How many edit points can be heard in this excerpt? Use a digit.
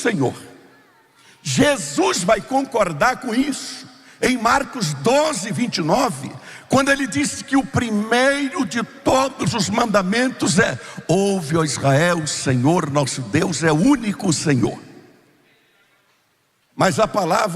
1